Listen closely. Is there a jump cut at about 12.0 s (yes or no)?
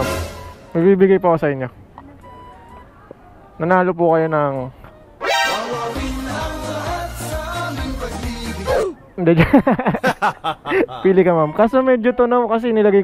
no